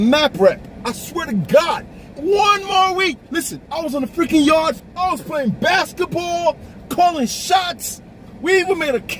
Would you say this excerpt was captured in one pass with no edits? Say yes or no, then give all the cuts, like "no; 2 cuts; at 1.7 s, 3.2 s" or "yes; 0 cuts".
no; 2 cuts; at 4.8 s, 8.3 s